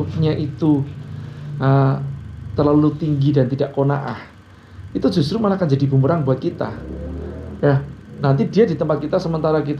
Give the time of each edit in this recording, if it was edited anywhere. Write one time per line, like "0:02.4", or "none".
none